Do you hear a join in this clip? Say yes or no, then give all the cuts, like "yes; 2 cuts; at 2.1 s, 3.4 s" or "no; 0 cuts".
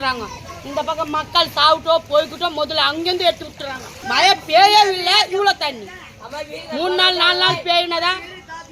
yes; 1 cut; at 4.0 s